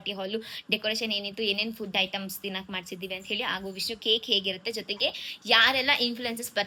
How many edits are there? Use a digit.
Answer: 0